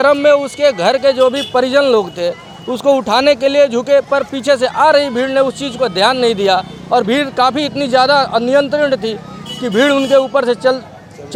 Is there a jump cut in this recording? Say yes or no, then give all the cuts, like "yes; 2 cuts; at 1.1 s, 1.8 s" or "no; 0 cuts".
no; 0 cuts